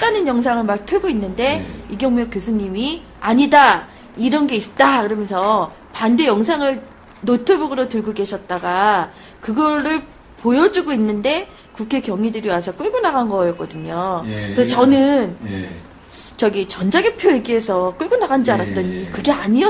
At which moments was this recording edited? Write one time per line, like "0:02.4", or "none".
0:03.0